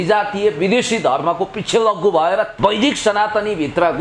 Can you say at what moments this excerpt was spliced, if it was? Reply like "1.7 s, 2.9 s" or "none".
2.5 s